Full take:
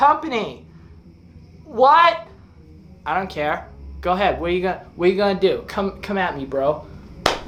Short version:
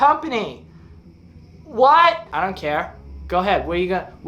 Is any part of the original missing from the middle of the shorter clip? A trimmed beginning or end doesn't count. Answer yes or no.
yes